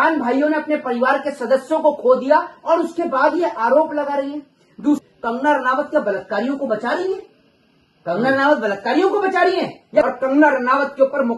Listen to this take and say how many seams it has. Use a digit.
2